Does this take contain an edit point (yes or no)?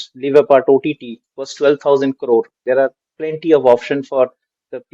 yes